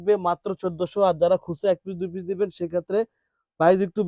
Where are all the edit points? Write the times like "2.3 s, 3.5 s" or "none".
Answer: none